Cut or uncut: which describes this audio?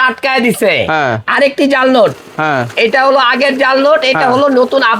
uncut